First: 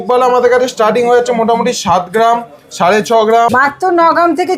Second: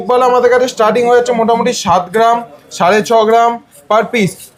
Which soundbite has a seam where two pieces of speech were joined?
first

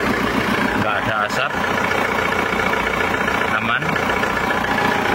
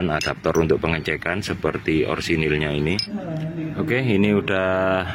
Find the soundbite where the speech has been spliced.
second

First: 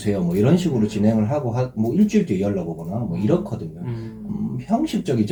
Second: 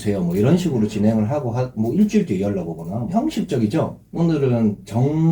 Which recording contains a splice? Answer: second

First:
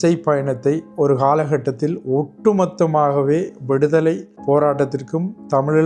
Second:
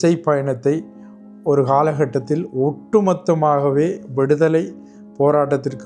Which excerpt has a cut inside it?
first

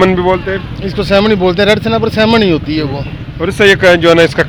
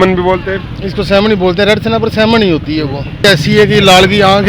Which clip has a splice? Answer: second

